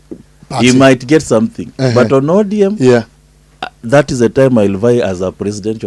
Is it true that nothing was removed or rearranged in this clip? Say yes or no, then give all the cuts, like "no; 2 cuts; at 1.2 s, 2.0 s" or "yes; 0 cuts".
yes; 0 cuts